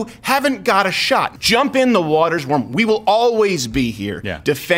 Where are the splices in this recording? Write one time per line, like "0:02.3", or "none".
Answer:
0:01.3